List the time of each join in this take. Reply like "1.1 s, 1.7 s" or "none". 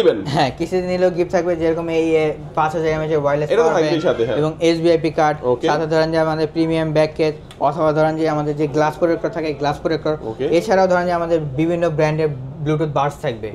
none

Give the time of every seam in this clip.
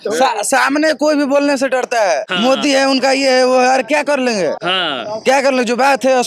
2.3 s, 4.6 s

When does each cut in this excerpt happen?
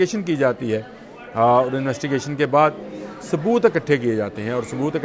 none

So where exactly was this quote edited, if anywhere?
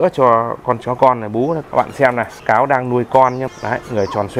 1.9 s, 3.5 s

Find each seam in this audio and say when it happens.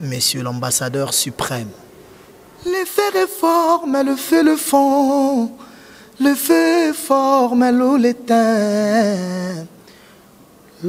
2.6 s

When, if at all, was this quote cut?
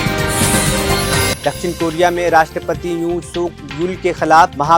none

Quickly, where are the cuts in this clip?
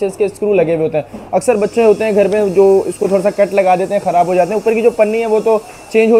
none

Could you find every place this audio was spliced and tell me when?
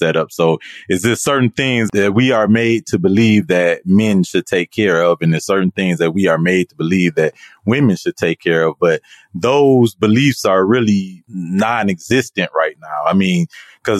none

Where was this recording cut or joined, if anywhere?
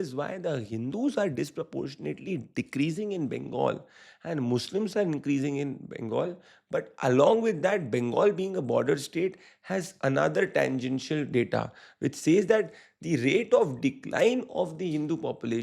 none

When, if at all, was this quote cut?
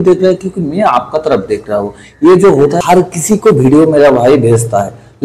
2.8 s

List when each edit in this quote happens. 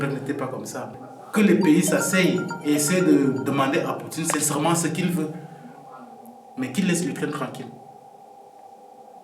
0.9 s

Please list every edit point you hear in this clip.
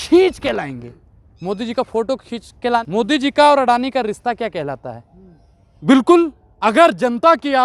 2.8 s, 5.7 s

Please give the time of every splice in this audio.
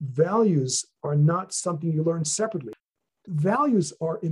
2.7 s

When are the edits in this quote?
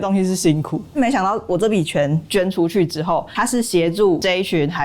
1.0 s

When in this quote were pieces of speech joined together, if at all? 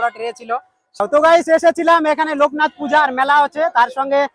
1.0 s

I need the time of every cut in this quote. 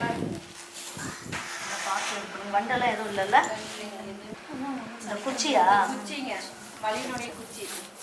4.3 s

